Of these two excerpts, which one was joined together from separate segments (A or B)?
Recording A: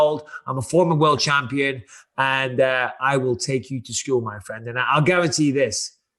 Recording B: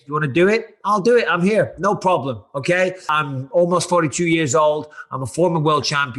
B